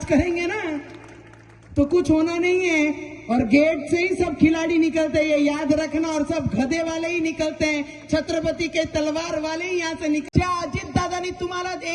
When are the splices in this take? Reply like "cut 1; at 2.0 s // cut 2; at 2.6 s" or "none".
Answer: cut 1; at 10.2 s